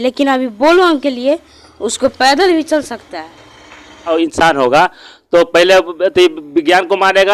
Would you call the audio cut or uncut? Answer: cut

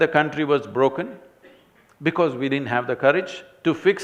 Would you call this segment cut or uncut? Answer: uncut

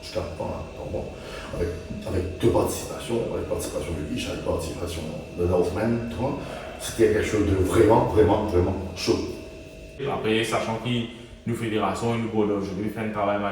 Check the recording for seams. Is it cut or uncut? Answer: cut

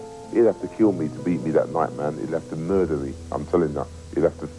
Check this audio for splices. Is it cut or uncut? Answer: uncut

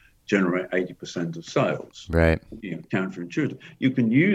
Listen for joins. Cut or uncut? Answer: uncut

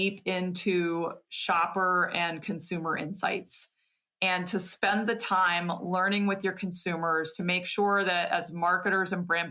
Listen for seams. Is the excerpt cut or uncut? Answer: uncut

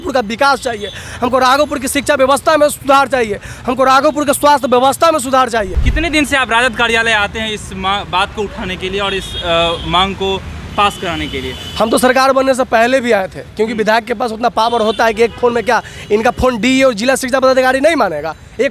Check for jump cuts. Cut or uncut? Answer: cut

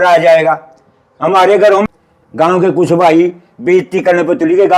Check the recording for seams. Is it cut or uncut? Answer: cut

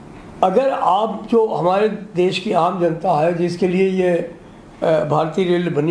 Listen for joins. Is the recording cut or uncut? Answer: uncut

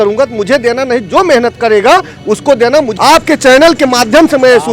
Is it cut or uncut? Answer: cut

